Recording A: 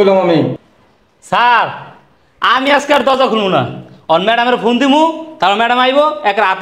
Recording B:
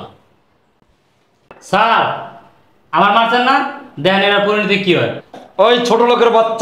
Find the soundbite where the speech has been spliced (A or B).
B